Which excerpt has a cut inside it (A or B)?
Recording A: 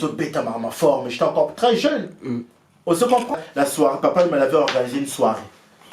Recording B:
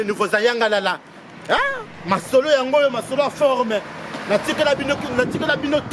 A